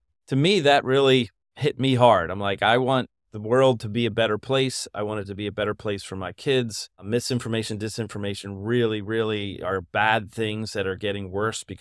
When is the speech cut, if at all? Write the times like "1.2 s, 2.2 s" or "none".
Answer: none